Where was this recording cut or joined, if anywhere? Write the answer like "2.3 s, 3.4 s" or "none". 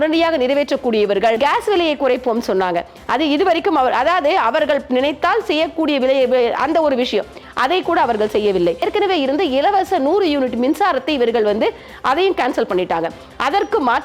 1.4 s, 8.9 s